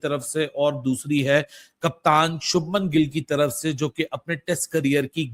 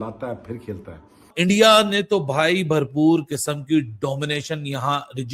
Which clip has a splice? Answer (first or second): second